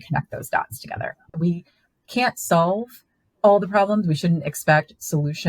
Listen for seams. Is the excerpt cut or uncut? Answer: cut